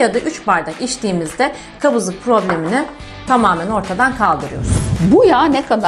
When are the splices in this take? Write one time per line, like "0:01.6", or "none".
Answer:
0:04.8